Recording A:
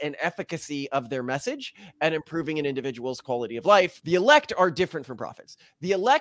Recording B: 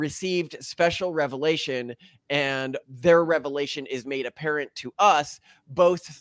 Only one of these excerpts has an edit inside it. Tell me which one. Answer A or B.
A